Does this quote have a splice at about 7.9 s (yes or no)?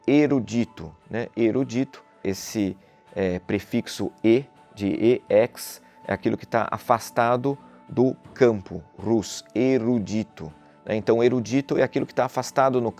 no